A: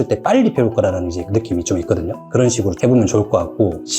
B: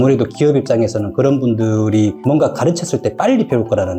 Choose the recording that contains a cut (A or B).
A